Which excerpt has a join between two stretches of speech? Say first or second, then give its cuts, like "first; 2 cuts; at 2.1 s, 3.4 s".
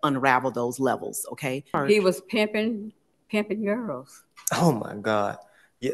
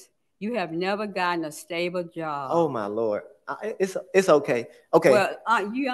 first; 1 cut; at 1.8 s